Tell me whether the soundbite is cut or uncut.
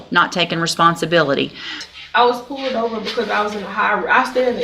cut